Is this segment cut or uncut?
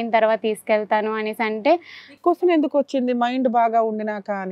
uncut